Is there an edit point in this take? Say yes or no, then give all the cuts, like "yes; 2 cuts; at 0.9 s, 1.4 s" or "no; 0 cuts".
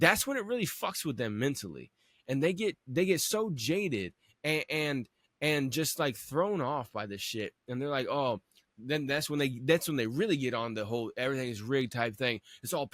no; 0 cuts